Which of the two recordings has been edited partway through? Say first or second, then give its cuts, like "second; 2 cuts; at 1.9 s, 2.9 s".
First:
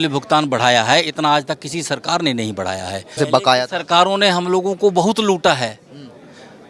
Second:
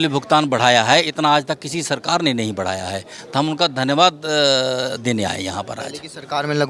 first; 1 cut; at 3.2 s